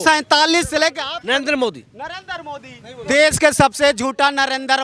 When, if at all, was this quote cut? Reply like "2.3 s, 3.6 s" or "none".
2.9 s